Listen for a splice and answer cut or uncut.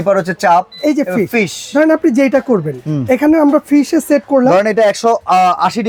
uncut